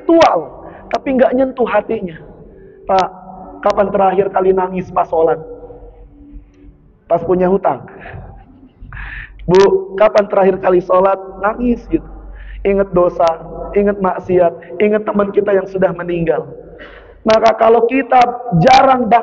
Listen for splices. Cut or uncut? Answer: uncut